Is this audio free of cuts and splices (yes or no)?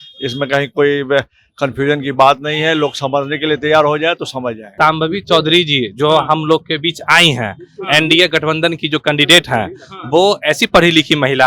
no